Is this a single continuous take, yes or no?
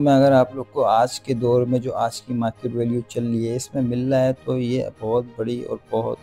yes